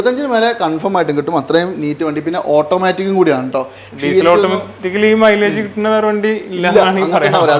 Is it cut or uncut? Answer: uncut